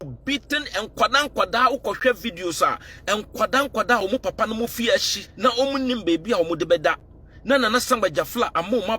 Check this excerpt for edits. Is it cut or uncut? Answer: cut